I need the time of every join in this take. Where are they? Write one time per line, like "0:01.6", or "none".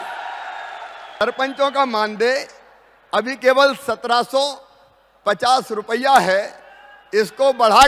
0:01.2

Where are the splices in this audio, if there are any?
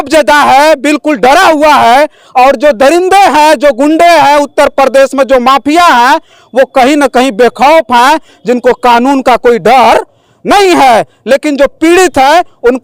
none

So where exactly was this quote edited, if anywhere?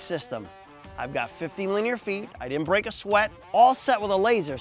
0:03.4

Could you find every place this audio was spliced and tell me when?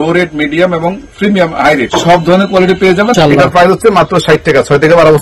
0:01.9
0:03.1

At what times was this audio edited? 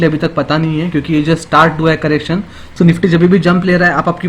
0:02.7

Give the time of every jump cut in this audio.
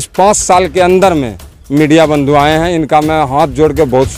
none

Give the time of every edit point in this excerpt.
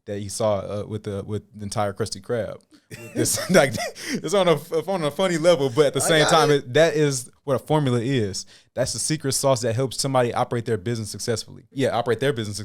0:11.7

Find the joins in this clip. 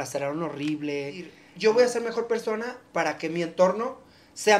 0:01.4

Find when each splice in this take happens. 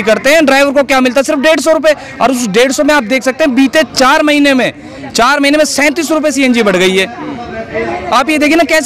none

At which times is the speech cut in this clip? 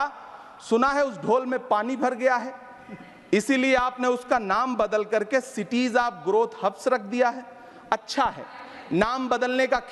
none

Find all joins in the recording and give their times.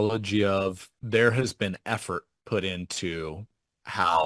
0:00.9

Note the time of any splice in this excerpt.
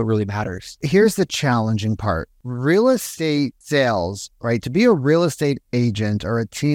0:00.8
0:02.4
0:03.3

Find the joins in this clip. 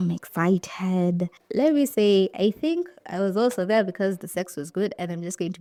none

